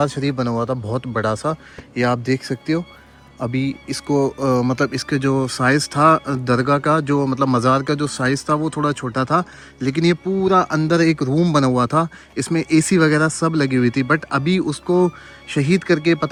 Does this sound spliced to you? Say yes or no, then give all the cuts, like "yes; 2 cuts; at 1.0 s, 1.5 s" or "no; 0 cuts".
no; 0 cuts